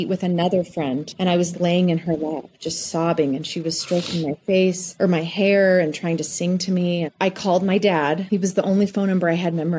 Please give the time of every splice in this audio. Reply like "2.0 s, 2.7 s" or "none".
none